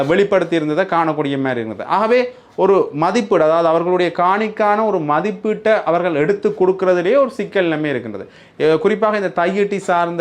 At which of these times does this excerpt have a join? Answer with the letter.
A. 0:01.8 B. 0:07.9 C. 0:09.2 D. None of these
D